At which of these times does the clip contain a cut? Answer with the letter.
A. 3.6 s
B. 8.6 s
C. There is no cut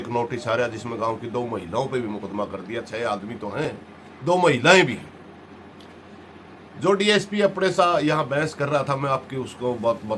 C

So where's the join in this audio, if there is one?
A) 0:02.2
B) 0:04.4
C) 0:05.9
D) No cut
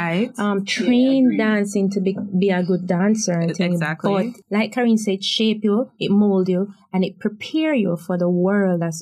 B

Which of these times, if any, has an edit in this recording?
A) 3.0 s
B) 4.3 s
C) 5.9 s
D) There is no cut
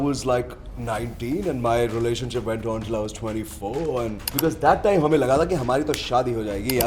B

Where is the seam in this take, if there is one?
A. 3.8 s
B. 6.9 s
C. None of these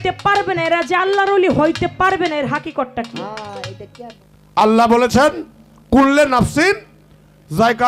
A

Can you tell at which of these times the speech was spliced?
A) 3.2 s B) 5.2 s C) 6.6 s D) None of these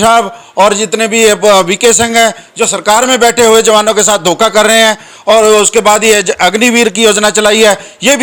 D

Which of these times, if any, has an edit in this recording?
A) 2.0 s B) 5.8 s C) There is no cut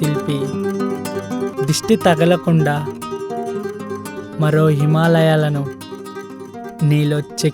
C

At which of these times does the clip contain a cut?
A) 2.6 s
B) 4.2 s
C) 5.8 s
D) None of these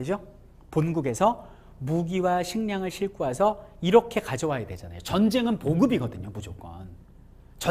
D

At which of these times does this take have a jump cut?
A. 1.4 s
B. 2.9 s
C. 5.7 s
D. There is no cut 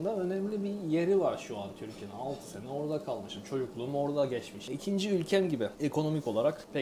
C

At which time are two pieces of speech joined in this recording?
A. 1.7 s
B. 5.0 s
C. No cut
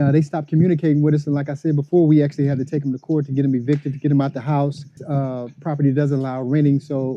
B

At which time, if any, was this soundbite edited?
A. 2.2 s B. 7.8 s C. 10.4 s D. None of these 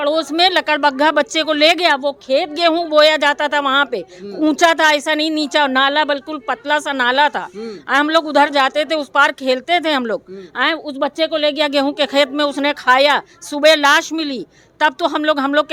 D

